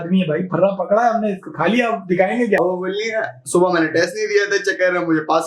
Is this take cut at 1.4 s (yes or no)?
no